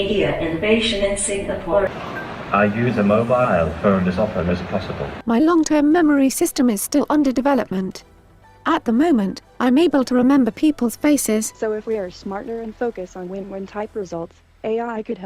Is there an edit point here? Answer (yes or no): yes